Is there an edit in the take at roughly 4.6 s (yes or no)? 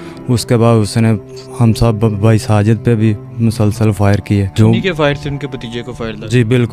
yes